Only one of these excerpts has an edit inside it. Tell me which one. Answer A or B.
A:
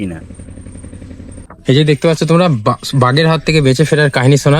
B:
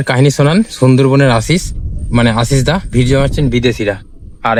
A